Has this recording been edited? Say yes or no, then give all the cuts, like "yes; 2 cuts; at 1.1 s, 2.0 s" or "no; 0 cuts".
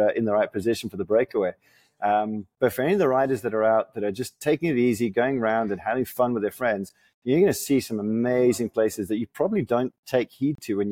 no; 0 cuts